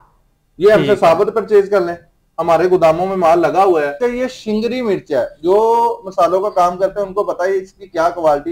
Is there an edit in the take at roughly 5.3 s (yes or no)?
no